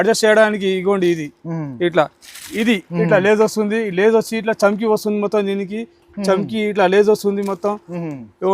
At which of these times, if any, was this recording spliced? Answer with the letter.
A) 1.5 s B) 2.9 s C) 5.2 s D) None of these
B